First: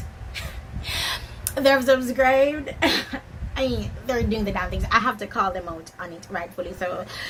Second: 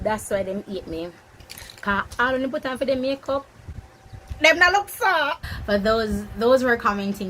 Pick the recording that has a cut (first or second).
second